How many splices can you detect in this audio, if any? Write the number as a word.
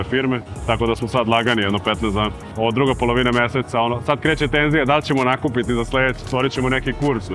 two